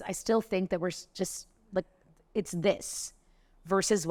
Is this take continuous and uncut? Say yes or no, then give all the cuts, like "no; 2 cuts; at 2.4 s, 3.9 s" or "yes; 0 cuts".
yes; 0 cuts